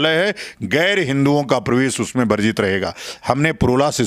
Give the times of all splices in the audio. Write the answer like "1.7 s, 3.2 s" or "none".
none